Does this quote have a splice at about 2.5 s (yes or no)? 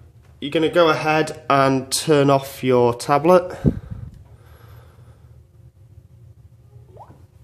no